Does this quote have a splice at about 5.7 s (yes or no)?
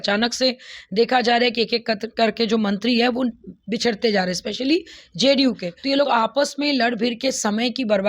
yes